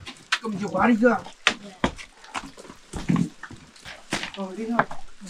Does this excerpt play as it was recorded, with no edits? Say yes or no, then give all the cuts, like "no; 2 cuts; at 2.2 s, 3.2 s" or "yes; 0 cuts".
yes; 0 cuts